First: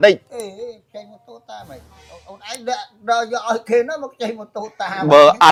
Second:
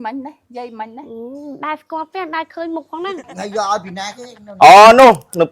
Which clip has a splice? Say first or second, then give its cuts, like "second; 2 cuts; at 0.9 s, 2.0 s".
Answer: second; 1 cut; at 3.3 s